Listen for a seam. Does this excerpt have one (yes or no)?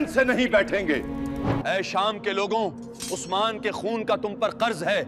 yes